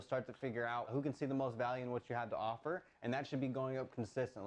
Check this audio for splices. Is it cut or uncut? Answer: cut